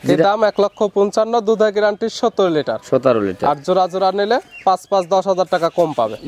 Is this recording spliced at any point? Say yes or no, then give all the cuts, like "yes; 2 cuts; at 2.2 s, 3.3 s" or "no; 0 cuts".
no; 0 cuts